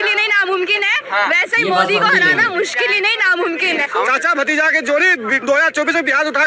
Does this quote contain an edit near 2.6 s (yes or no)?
no